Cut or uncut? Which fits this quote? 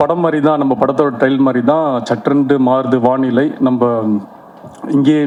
uncut